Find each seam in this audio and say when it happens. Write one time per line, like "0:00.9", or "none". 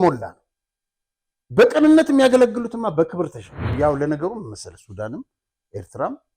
0:03.7